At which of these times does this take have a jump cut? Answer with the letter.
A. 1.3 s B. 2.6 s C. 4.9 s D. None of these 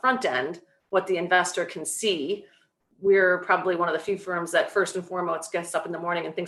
D